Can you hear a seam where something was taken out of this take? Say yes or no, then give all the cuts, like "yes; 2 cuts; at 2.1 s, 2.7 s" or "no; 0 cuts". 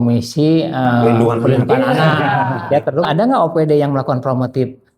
yes; 1 cut; at 3.1 s